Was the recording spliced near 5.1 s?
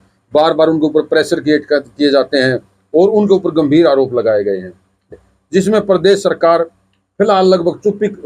yes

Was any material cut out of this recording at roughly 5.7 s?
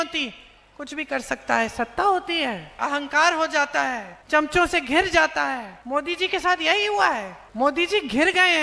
yes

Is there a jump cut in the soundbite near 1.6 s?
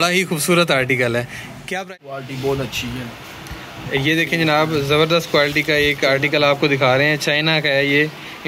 yes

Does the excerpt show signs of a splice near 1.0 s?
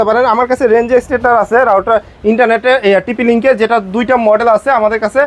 no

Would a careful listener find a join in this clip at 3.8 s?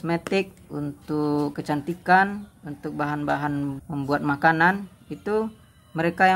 yes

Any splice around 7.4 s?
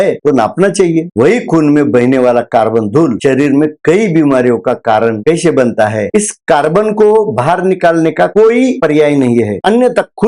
no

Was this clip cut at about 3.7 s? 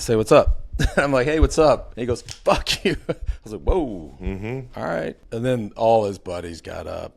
no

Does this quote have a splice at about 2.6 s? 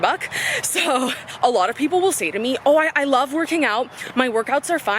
yes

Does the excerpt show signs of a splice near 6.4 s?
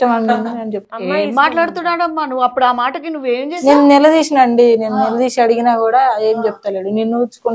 no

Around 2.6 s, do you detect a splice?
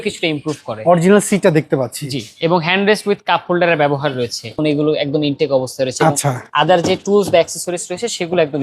no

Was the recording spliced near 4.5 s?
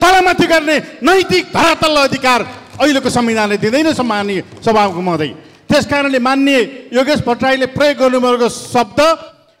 no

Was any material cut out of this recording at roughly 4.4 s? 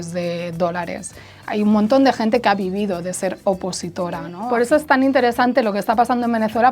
yes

